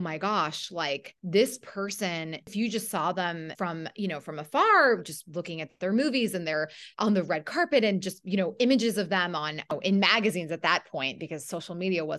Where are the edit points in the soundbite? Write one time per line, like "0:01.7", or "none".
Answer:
0:01.1
0:02.5
0:03.5
0:09.7